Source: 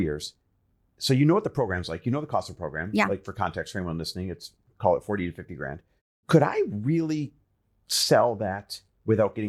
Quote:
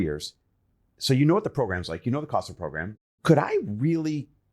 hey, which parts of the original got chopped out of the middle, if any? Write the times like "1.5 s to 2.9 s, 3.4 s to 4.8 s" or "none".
2.8 s to 5.8 s